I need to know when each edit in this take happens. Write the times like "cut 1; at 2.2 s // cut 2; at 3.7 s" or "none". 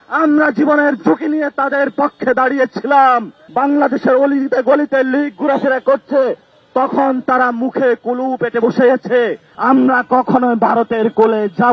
cut 1; at 3.4 s // cut 2; at 9.5 s